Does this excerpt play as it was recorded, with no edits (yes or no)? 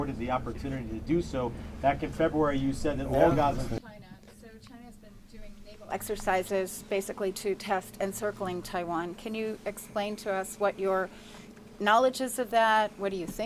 no